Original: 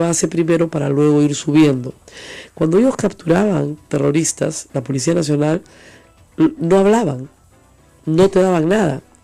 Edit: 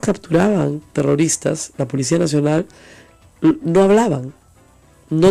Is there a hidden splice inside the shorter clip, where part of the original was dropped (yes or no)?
no